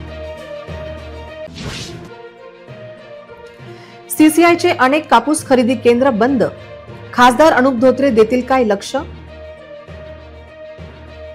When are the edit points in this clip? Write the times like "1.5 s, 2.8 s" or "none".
1.4 s